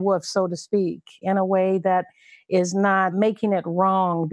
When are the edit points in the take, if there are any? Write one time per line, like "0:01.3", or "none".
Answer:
0:01.2
0:03.1

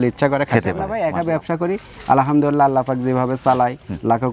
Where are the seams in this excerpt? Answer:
0:00.9

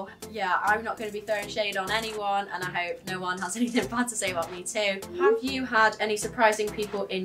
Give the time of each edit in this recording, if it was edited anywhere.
0:05.0

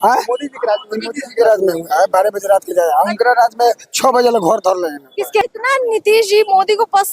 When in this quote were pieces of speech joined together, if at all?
0:05.4

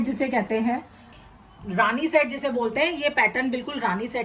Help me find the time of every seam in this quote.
0:01.0

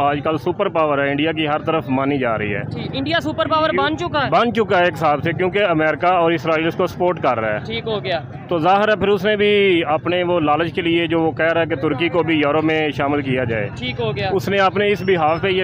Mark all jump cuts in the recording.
none

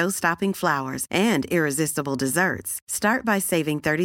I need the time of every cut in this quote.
none

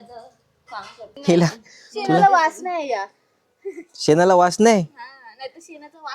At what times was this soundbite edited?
0:01.1

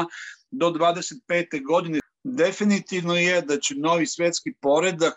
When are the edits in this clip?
0:02.1

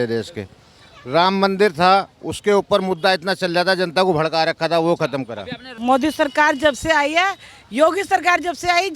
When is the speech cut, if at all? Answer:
0:05.7

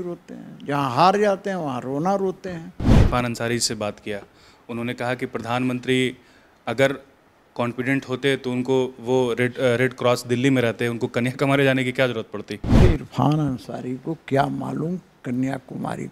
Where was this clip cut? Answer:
0:02.9
0:12.8

